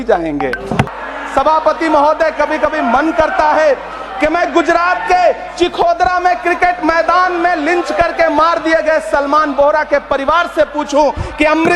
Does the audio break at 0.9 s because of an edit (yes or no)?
yes